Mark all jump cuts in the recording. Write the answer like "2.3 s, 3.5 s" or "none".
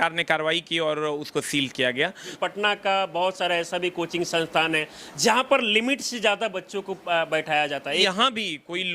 2.3 s, 8.0 s